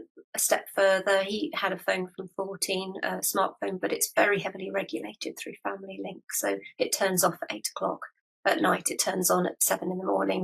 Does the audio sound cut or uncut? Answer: uncut